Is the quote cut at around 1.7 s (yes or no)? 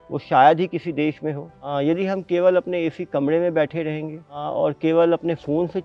yes